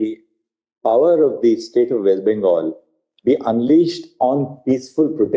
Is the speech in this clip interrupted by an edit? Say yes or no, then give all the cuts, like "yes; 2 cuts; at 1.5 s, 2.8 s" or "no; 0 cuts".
no; 0 cuts